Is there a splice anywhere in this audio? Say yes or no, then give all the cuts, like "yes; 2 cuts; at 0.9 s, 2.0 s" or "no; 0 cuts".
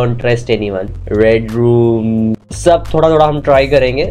yes; 1 cut; at 0.9 s